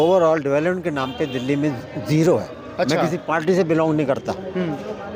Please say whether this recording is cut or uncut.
uncut